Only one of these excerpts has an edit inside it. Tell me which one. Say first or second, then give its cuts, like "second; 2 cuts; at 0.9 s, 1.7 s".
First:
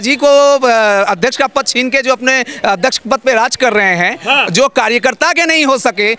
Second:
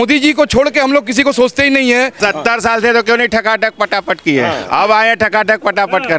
second; 1 cut; at 2.2 s